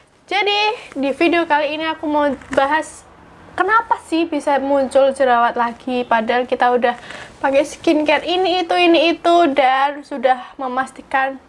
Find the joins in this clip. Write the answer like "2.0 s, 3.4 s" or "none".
none